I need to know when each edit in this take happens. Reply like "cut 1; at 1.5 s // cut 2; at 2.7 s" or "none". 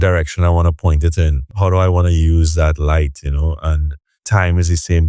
cut 1; at 1.5 s // cut 2; at 4.2 s